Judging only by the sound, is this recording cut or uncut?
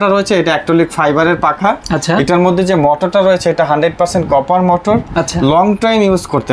uncut